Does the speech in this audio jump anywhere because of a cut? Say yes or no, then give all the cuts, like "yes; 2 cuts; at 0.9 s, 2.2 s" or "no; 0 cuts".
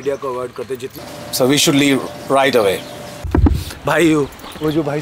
yes; 2 cuts; at 0.9 s, 3.1 s